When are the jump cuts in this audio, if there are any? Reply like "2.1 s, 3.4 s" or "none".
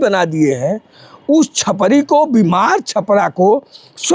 none